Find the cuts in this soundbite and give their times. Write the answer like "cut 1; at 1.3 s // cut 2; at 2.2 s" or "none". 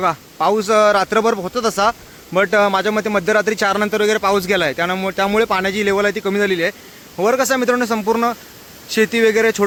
none